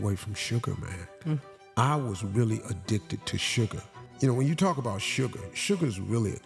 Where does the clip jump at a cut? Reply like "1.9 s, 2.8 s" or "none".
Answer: 4.1 s